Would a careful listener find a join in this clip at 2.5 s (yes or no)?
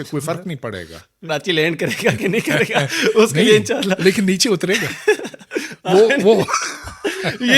no